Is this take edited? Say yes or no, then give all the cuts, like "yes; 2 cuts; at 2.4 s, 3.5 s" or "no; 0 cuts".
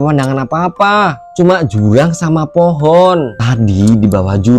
yes; 1 cut; at 3.4 s